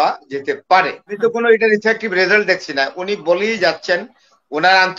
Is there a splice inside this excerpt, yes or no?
yes